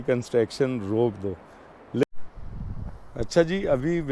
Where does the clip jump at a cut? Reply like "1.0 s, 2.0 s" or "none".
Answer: 2.0 s